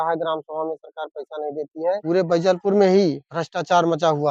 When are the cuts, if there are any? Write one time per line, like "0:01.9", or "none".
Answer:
0:02.0

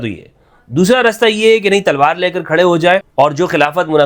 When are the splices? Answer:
0:03.1

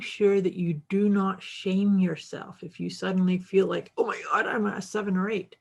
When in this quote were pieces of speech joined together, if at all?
none

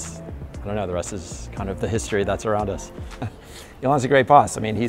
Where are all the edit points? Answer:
0:03.4

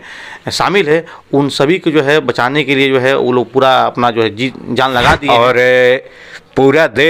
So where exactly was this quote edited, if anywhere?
0:05.2

